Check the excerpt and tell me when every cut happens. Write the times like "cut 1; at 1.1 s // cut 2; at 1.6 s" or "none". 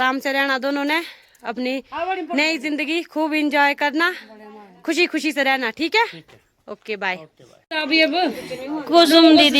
cut 1; at 7.7 s